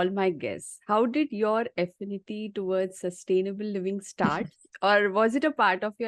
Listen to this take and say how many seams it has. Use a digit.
0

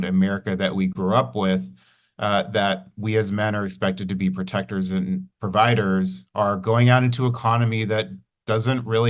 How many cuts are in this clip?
0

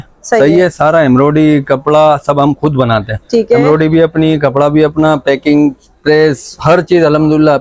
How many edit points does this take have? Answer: 0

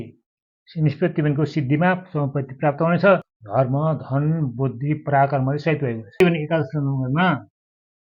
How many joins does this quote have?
2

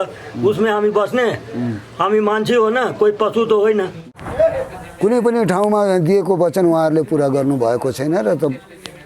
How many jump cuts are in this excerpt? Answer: 1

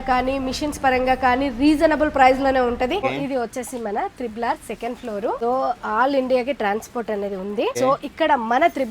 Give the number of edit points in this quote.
3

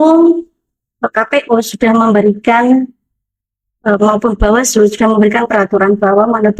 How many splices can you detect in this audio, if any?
0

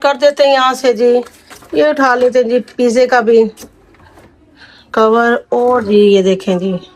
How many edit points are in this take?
0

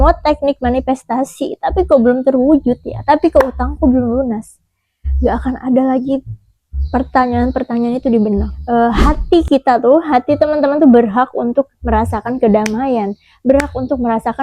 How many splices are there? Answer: 1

